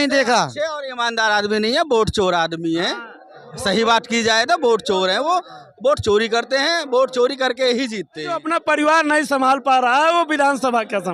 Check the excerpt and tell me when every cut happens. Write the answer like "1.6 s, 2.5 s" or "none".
8.4 s

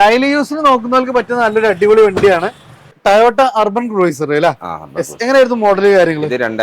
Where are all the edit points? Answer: 3.0 s

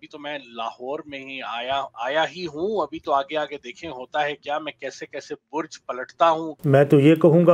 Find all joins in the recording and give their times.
6.5 s

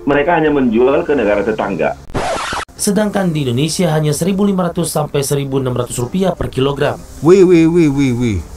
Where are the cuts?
2.4 s

